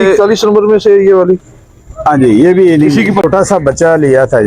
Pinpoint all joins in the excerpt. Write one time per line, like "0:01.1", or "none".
0:03.2